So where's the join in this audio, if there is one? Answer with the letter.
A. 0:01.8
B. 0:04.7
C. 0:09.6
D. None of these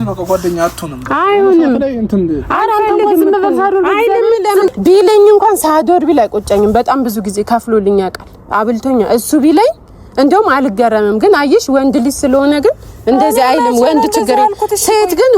B